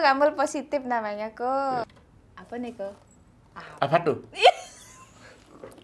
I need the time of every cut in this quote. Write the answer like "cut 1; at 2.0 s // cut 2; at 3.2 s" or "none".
cut 1; at 1.9 s

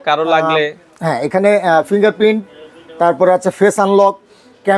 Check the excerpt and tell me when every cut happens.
none

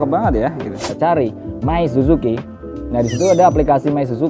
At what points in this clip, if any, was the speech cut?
cut 1; at 0.9 s

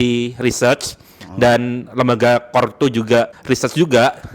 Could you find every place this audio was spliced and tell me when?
cut 1; at 3.4 s

